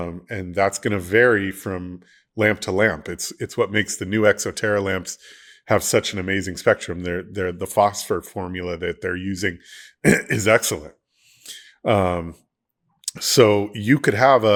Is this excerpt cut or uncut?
uncut